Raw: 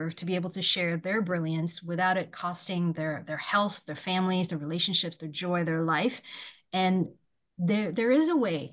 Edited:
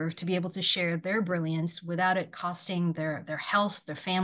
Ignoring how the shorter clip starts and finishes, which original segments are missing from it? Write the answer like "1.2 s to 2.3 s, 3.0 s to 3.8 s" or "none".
none